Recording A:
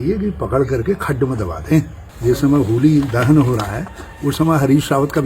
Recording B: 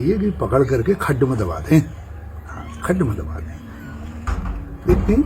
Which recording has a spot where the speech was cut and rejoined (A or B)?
A